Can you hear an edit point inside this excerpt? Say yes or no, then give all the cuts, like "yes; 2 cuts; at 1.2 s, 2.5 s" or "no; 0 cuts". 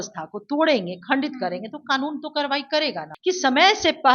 yes; 1 cut; at 3.1 s